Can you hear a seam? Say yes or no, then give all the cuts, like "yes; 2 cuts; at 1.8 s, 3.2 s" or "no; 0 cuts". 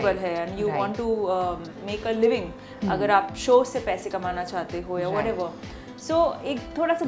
no; 0 cuts